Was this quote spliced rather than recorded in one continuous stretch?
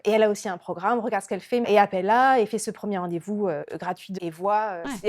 yes; 1 cut; at 4.1 s

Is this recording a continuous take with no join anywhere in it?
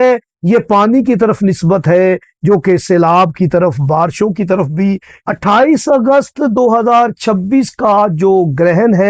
no; 1 cut; at 5.1 s

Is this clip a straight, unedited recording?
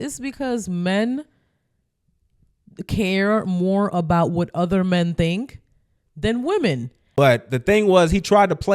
no; 1 cut; at 6.9 s

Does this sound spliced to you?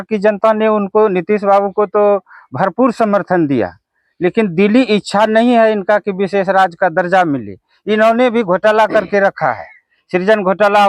no; 0 cuts

